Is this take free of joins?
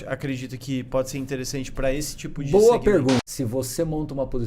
no; 1 cut; at 3.3 s

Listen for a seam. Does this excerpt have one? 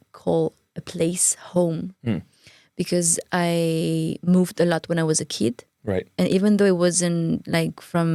no; 0 cuts

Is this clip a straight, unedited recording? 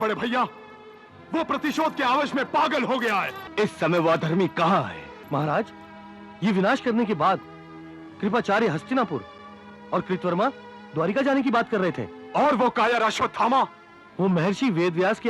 no; 2 cuts; at 3.4 s, 5.1 s

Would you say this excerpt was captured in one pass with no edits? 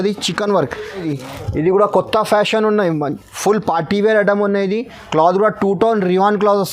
no; 1 cut; at 1.1 s

